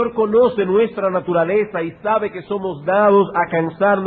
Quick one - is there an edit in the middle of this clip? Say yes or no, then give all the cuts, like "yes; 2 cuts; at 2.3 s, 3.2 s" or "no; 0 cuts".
yes; 1 cut; at 2.1 s